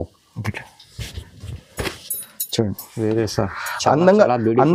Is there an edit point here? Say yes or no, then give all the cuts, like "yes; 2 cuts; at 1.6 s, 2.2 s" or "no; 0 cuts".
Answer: no; 0 cuts